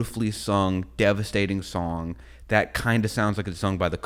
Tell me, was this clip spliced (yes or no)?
no